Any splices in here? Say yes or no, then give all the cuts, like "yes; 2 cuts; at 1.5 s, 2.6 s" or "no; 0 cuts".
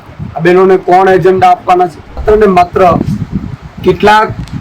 yes; 1 cut; at 2.2 s